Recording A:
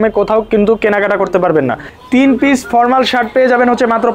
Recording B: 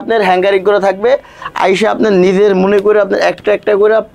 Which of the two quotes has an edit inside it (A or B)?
A